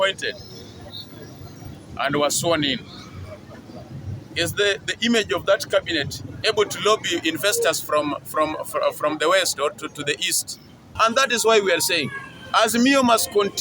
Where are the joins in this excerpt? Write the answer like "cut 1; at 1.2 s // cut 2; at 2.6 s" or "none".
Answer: cut 1; at 10.9 s